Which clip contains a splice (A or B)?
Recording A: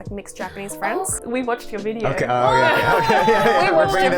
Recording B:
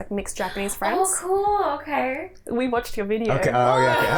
A